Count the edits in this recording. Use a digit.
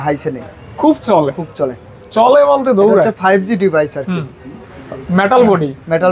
0